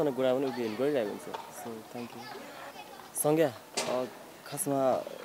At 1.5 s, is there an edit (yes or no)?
no